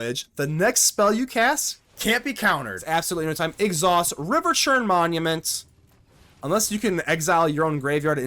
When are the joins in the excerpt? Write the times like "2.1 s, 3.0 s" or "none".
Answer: 2.8 s